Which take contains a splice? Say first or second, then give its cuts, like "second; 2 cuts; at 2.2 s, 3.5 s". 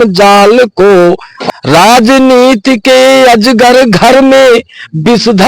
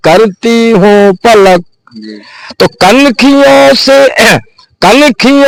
first; 1 cut; at 1.3 s